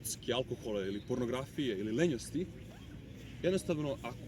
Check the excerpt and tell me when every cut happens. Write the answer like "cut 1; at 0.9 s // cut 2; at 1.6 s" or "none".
none